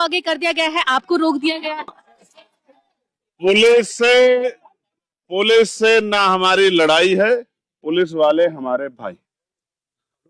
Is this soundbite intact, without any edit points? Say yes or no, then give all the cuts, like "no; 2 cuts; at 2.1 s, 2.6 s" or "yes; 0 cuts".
yes; 0 cuts